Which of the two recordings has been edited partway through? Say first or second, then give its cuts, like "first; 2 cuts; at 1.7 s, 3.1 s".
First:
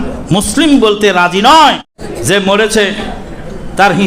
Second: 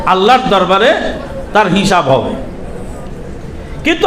first; 1 cut; at 2.0 s